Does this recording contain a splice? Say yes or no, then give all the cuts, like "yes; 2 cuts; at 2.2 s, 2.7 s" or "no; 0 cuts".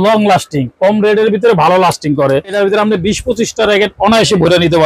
yes; 1 cut; at 2.5 s